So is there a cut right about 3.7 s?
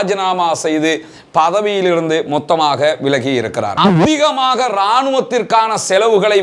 yes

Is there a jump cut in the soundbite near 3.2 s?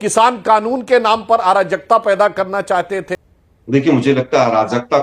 yes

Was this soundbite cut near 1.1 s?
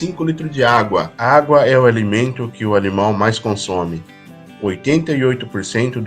yes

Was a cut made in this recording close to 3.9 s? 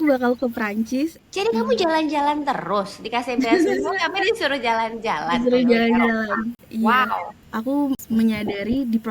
no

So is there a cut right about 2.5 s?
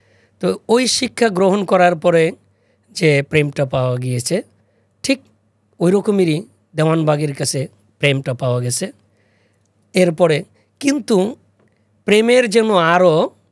no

